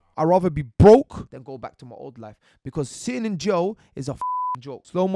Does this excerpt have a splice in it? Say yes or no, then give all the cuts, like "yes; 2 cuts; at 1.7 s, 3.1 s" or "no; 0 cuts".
yes; 2 cuts; at 1.3 s, 4.2 s